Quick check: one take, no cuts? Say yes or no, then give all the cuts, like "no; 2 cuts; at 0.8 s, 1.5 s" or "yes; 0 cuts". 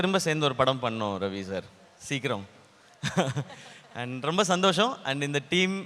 yes; 0 cuts